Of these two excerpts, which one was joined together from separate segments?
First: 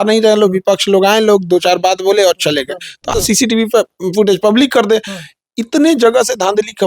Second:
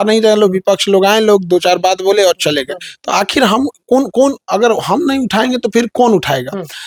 first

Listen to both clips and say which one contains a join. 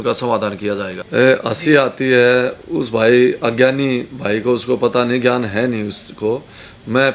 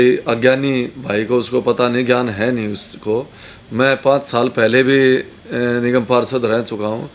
first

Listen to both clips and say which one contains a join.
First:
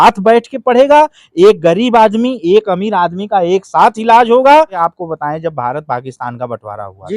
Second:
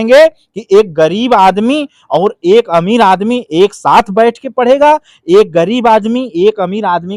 first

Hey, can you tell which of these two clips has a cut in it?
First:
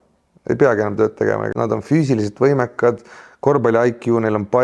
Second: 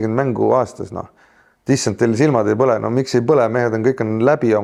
first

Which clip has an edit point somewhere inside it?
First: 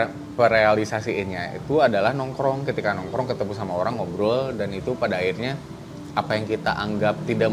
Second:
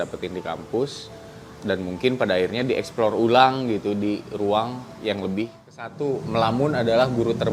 second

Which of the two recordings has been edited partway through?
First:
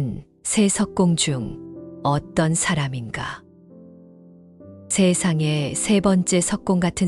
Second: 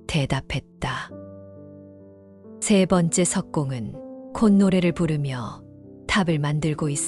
second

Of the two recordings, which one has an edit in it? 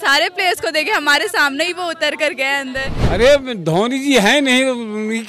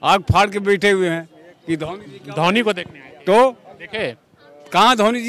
first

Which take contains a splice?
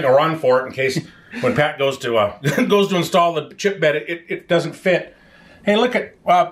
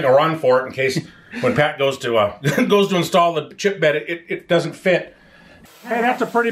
second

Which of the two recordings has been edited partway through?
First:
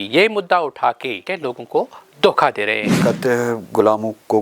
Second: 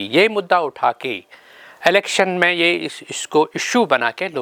first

